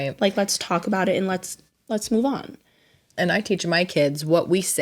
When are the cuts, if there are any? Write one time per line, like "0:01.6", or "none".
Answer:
0:01.6